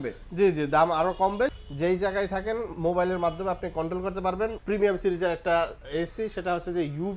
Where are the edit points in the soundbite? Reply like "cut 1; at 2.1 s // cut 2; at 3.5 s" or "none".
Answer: cut 1; at 1.6 s // cut 2; at 4.6 s // cut 3; at 5.8 s